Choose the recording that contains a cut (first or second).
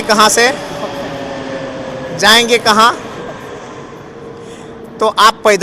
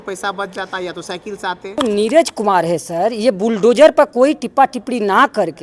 second